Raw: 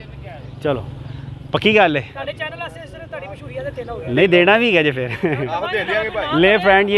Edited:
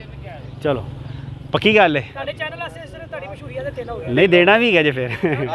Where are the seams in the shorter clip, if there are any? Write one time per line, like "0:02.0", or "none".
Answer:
none